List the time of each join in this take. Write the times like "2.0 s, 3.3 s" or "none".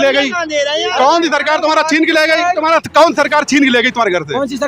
2.6 s